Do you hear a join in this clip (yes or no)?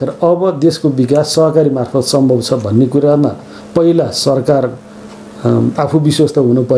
no